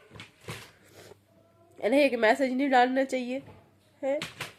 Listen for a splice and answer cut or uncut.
uncut